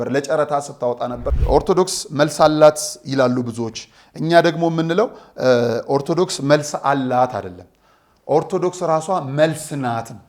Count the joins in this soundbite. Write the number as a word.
one